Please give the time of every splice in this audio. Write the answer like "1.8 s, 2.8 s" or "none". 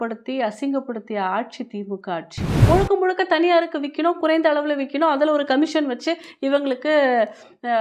2.5 s

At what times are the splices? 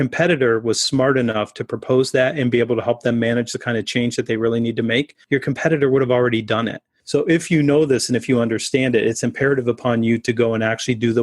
5.2 s

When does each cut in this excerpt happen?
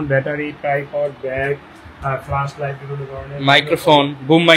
none

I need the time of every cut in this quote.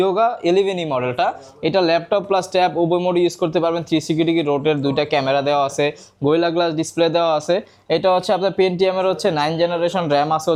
none

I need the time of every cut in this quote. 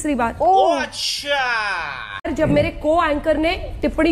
2.3 s

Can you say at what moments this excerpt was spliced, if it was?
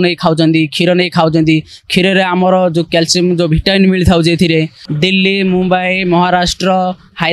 4.8 s

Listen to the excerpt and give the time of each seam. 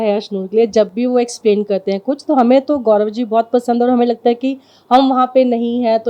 none

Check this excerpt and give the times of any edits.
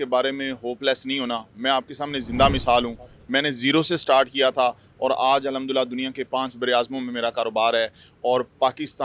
none

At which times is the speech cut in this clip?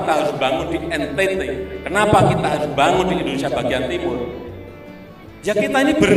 none

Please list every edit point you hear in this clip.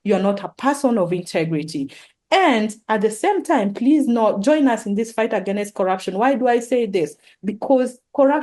none

